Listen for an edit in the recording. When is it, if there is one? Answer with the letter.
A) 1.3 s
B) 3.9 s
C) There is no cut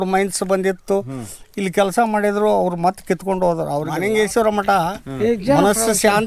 B